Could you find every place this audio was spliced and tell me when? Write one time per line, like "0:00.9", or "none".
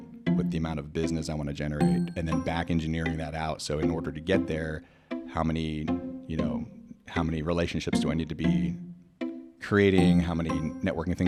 none